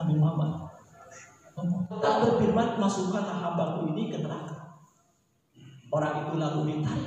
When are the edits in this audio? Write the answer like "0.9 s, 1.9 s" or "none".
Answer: 2.0 s